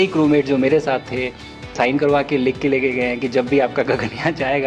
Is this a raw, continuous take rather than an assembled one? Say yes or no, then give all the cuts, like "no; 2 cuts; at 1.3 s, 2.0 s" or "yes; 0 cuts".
no; 1 cut; at 1.7 s